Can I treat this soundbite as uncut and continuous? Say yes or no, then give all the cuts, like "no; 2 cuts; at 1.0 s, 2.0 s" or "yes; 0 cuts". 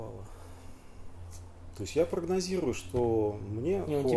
yes; 0 cuts